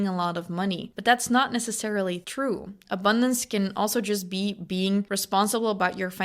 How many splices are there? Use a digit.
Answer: 3